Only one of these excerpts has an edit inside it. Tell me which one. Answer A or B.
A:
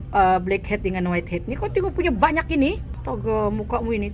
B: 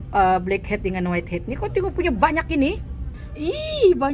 B